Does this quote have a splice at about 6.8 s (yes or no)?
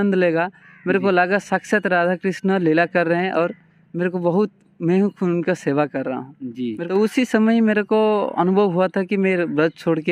yes